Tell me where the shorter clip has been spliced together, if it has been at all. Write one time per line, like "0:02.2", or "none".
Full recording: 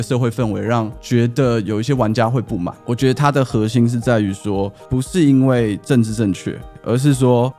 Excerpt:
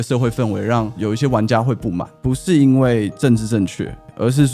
0:01.0
0:02.1

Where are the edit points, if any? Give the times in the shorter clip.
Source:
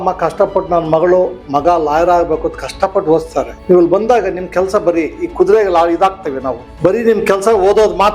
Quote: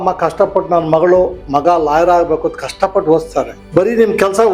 0:03.5

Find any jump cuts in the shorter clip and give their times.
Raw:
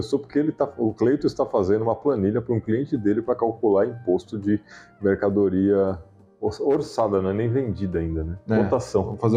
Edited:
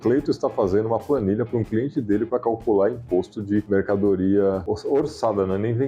0:03.7
0:04.7

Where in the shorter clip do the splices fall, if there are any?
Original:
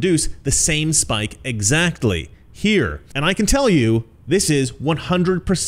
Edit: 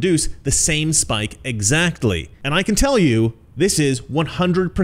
0:02.3

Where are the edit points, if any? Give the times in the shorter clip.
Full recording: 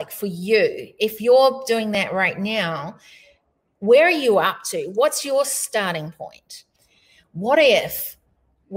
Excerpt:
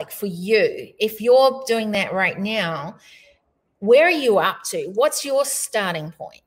none

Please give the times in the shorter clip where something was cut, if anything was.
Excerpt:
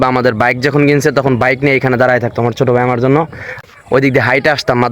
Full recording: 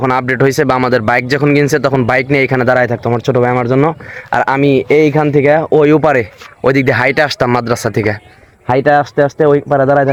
0:03.6

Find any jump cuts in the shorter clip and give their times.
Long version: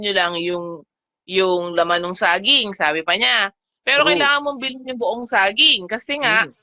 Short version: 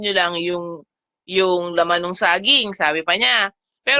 none

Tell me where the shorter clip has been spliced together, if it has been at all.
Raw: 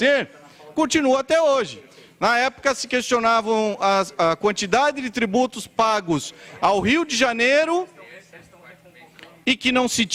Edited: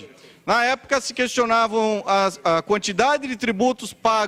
none

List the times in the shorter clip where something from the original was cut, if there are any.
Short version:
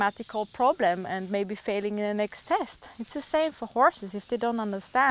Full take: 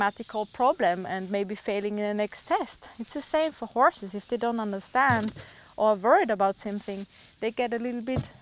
none

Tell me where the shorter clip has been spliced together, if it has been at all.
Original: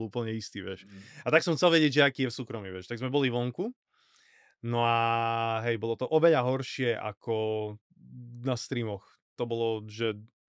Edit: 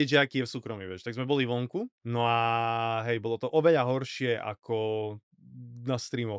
0:02.0

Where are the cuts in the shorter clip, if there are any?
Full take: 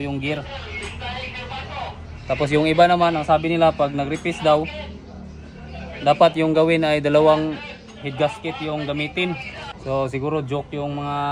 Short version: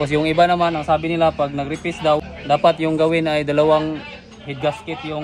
0:02.3

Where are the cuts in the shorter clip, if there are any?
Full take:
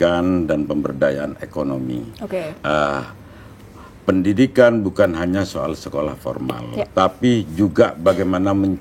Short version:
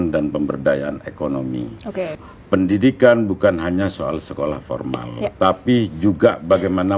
0:02.2

